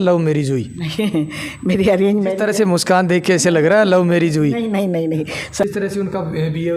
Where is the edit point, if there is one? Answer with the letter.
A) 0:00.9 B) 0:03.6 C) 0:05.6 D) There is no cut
C